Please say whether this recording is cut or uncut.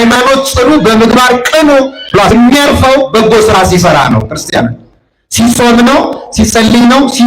cut